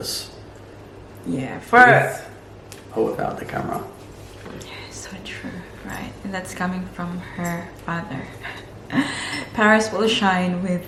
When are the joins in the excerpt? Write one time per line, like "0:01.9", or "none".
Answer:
none